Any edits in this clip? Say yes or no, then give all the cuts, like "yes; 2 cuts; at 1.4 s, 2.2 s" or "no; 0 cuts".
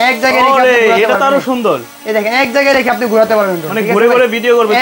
no; 0 cuts